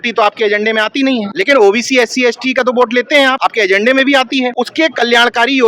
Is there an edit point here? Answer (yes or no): yes